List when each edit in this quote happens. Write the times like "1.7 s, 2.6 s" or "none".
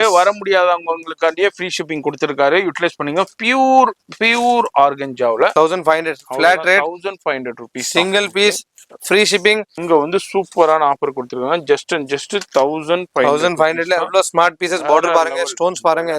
5.5 s, 9.7 s